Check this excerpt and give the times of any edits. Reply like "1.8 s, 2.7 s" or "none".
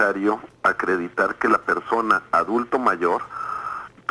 none